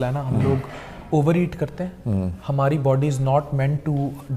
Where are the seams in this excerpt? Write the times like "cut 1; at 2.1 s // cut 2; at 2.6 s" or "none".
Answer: none